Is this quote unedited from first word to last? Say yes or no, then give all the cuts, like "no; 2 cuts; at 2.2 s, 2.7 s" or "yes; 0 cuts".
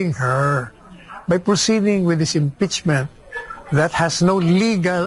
yes; 0 cuts